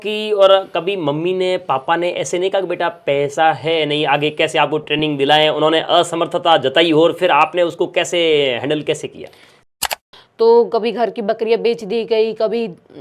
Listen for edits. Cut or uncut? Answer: cut